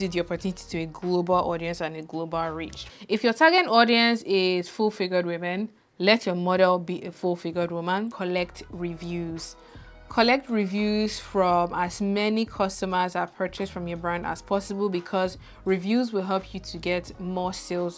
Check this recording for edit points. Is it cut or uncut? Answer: cut